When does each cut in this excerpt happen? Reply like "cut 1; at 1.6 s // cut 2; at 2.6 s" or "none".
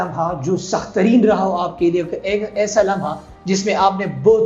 none